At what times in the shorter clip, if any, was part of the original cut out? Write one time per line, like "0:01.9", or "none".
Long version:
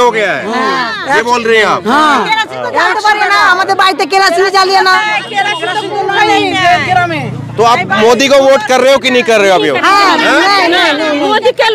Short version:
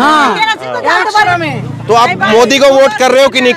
0:01.3

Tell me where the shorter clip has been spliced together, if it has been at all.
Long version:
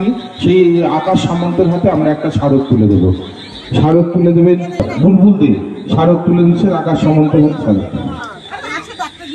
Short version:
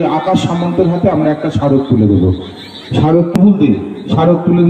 0:03.3

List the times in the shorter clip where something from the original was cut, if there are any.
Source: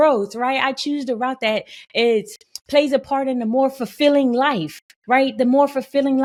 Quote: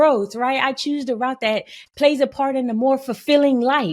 0:01.8

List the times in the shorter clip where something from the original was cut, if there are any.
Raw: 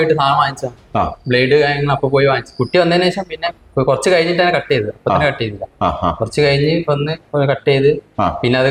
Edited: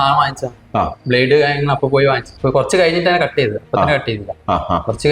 0:02.3

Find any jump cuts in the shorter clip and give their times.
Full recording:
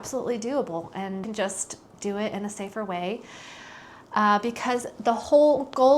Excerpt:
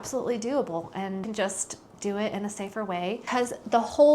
0:03.2

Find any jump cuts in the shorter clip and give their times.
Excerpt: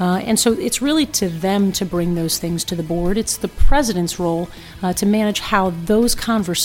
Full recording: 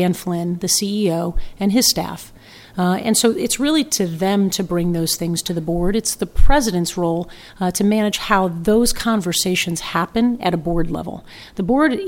none

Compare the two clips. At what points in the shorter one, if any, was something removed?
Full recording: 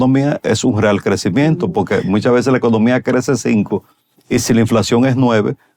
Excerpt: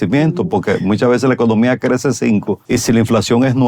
0:02.6

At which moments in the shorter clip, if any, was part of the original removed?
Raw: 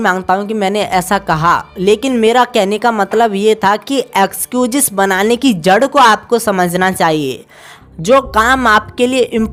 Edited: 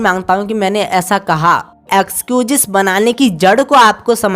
0:01.8

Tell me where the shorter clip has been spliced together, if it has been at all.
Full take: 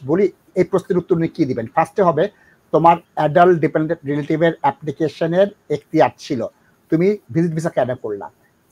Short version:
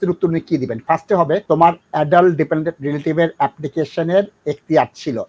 0:01.4

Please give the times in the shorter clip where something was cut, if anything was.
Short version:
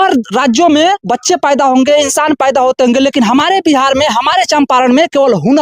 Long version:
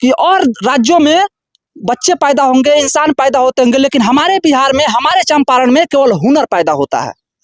0:01.0

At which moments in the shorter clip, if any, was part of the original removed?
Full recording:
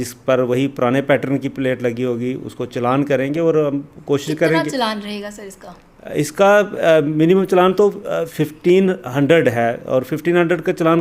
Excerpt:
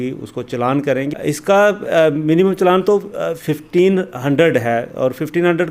0:01.1

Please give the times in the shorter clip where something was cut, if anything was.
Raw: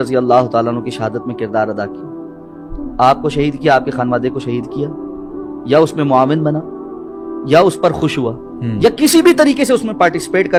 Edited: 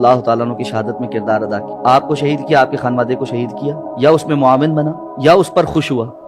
0:01.7
0:03.8
0:05.0

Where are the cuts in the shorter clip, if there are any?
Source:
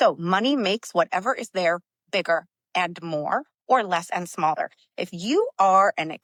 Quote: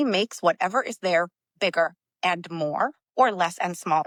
none

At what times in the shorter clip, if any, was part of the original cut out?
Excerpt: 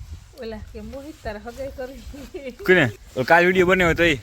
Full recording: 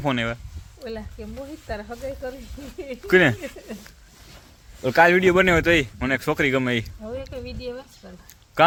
0:03.0

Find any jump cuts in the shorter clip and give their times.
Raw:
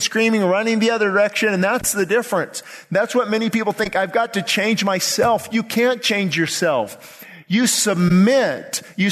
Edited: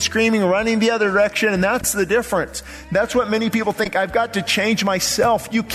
none

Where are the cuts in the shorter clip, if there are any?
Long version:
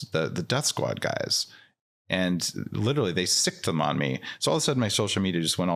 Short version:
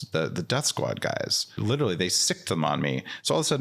0:01.5

